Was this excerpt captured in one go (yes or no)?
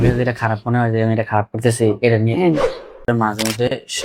no